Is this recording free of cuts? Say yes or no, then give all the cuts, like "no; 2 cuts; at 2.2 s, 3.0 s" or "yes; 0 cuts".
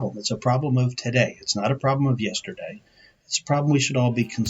yes; 0 cuts